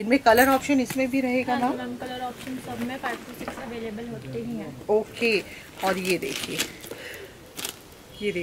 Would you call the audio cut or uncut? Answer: uncut